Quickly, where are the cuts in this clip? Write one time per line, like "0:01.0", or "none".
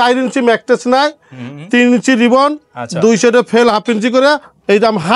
none